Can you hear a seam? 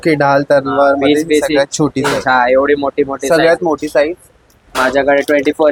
no; 0 cuts

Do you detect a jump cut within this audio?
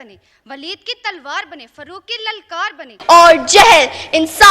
yes; 1 cut; at 2.9 s

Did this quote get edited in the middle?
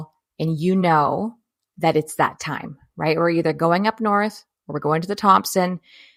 no; 0 cuts

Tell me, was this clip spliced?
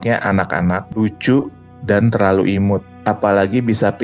yes; 2 cuts; at 0.9 s, 2.9 s

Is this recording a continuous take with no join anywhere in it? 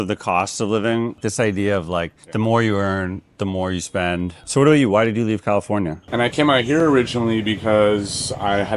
no; 2 cuts; at 1.2 s, 6.0 s

